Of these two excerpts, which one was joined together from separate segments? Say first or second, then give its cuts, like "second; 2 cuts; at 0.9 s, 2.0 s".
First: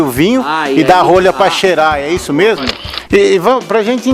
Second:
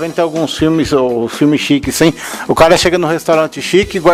first; 1 cut; at 2.7 s